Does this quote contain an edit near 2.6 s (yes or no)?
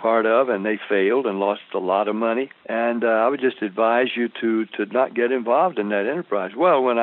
yes